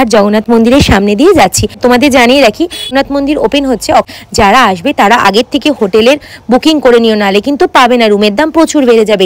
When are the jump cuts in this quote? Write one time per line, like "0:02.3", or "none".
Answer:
0:01.8
0:02.9
0:04.1